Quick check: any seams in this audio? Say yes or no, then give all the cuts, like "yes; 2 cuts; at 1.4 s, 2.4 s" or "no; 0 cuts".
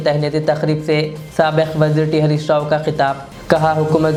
no; 0 cuts